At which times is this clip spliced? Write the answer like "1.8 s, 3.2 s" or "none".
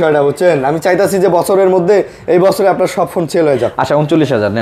none